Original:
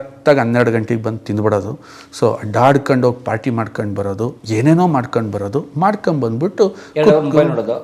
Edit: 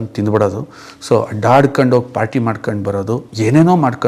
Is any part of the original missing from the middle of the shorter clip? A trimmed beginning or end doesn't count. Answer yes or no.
no